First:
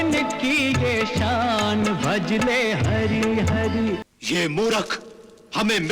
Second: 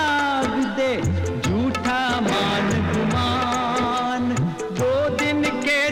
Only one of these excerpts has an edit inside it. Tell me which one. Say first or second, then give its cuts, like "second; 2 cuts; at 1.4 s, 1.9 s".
first; 1 cut; at 4.0 s